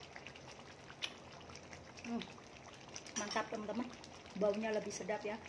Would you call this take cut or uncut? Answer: uncut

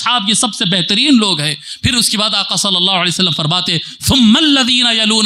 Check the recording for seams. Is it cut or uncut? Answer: uncut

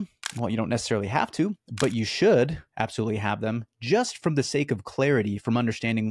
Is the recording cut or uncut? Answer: uncut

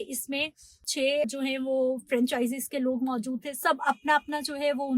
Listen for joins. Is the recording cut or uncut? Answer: cut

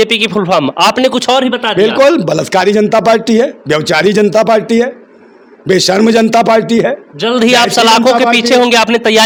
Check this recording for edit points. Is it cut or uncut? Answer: uncut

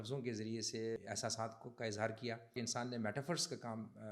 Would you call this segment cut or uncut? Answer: cut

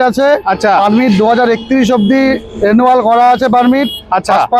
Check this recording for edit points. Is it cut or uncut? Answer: uncut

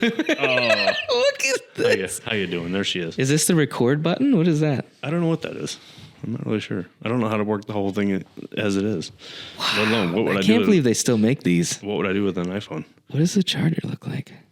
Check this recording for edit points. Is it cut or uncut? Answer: uncut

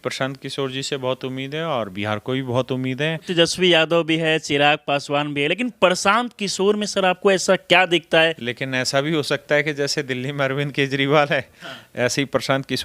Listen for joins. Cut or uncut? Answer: cut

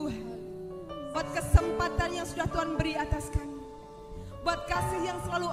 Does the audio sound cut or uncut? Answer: uncut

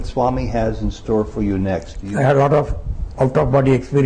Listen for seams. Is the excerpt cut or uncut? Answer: cut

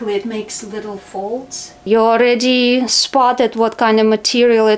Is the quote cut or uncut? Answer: cut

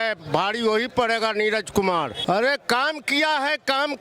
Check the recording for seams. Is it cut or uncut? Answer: cut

